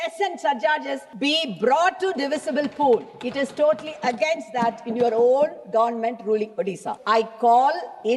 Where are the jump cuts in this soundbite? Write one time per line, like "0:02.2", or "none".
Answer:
0:01.0
0:06.9